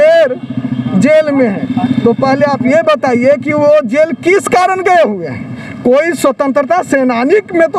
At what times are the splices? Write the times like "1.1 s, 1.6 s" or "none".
none